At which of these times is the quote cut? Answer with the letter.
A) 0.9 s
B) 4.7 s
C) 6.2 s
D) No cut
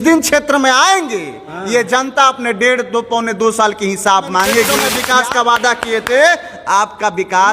B